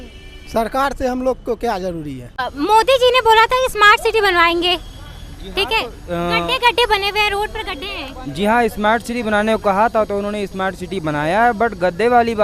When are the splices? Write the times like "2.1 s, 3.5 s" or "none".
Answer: 2.5 s